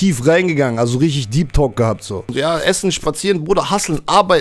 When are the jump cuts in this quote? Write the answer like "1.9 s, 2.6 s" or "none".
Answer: 2.3 s